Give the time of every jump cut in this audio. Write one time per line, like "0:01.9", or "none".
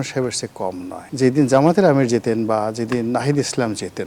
0:01.0